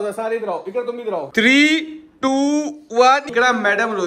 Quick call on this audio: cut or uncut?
cut